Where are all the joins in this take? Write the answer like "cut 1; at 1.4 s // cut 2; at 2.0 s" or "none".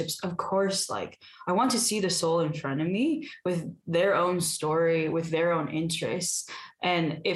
none